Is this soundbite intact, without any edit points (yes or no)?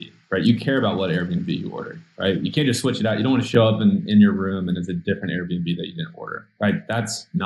no